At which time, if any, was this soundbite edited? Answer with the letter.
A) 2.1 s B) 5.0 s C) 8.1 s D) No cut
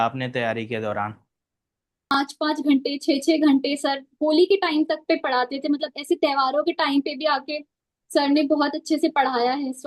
A